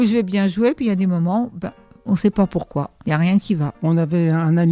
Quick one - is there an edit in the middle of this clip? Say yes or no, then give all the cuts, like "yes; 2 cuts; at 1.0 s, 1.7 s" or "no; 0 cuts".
yes; 2 cuts; at 2.9 s, 3.7 s